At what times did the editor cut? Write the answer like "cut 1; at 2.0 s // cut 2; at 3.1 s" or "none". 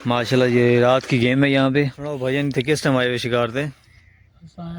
cut 1; at 2.2 s